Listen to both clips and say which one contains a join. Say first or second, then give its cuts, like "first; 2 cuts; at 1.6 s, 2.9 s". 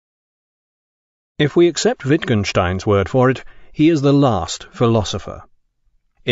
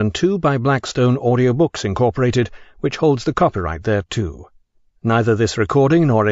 second; 1 cut; at 2.6 s